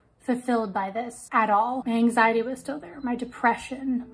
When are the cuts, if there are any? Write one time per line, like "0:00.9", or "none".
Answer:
none